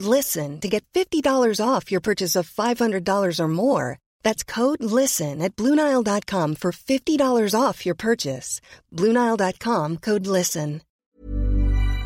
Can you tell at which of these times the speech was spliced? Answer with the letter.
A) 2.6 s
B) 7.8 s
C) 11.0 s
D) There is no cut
C